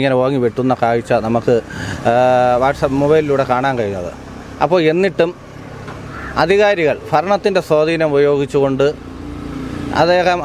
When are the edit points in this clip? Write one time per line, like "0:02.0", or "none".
none